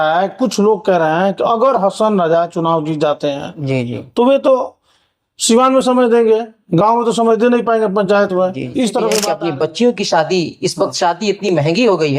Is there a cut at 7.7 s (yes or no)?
no